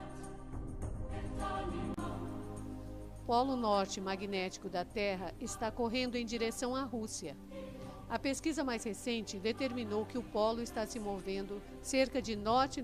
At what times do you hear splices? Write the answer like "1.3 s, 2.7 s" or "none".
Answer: none